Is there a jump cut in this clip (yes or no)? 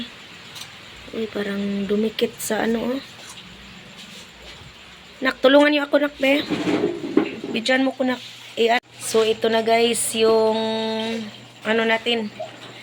yes